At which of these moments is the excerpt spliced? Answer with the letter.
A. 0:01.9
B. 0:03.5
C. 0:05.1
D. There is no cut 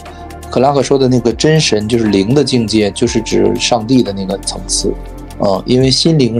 D